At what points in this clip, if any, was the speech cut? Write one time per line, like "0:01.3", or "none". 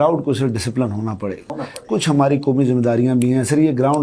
0:01.4